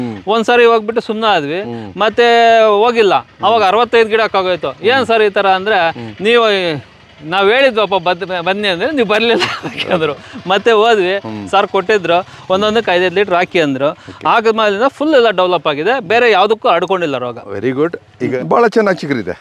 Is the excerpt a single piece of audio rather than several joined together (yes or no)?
no